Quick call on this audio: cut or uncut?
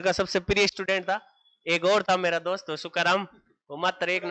uncut